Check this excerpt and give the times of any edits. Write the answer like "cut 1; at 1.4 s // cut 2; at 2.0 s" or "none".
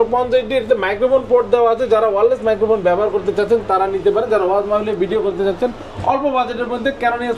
none